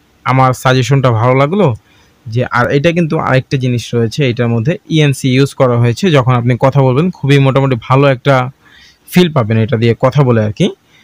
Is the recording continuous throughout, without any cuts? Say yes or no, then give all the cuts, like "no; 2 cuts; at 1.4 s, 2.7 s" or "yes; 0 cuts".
yes; 0 cuts